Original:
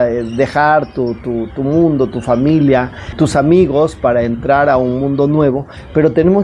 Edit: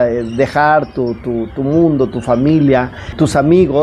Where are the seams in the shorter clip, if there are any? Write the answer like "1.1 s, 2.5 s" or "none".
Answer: none